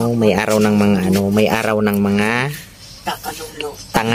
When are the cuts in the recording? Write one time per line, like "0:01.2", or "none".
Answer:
none